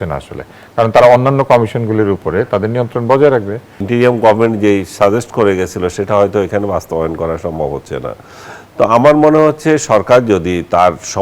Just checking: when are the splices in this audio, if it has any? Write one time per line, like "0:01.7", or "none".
0:03.8